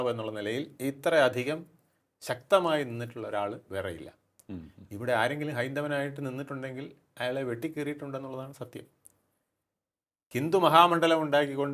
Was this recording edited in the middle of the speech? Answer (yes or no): no